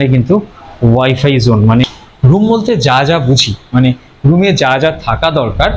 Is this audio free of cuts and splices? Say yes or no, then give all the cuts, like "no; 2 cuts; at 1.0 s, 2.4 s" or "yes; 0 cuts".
no; 1 cut; at 2.0 s